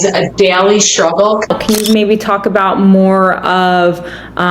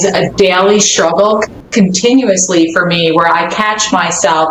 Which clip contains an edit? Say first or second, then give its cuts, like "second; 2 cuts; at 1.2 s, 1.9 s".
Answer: first; 1 cut; at 1.5 s